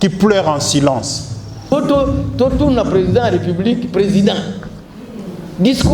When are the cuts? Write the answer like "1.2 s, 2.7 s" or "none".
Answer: 1.7 s